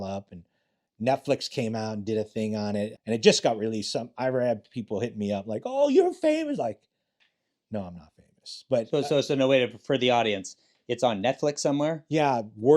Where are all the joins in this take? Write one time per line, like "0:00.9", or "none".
0:02.9